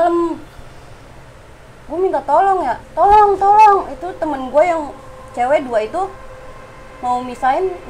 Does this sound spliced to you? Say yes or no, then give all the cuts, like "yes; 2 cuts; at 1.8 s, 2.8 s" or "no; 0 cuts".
no; 0 cuts